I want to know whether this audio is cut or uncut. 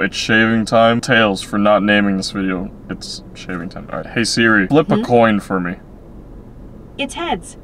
cut